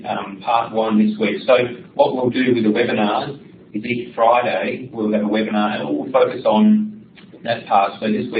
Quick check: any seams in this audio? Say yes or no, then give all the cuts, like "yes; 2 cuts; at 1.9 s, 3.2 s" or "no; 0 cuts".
yes; 1 cut; at 1.2 s